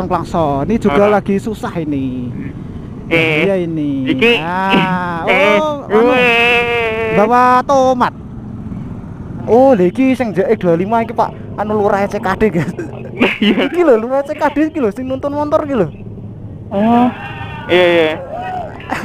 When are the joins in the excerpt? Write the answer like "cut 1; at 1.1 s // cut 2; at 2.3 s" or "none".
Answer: cut 1; at 9.5 s